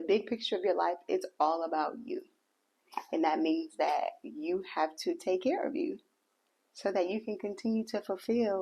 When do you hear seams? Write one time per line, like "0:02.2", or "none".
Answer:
none